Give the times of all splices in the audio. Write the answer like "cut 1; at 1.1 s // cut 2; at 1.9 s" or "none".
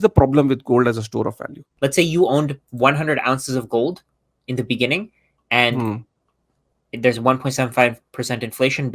cut 1; at 1.6 s